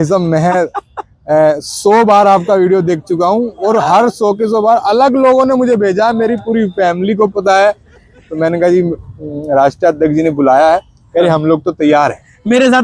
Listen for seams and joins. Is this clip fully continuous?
yes; 0 cuts

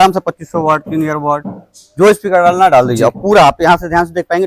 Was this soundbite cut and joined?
no; 0 cuts

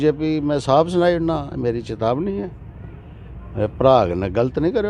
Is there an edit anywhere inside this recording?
no; 0 cuts

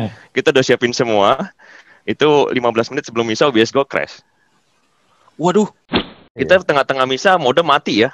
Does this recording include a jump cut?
yes; 1 cut; at 6.2 s

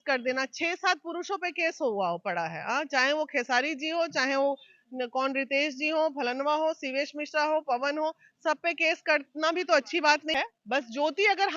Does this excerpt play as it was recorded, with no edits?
no; 1 cut; at 10.3 s

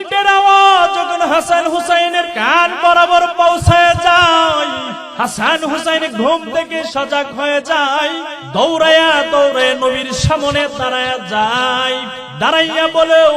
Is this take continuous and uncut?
no; 4 cuts; at 2.4 s, 5.0 s, 8.3 s, 12.2 s

